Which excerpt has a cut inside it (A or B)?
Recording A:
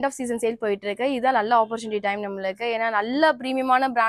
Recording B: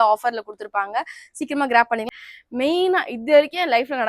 B